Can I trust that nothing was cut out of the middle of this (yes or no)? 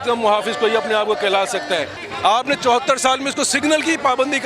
no